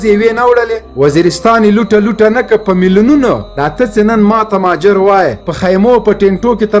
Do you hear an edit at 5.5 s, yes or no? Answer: yes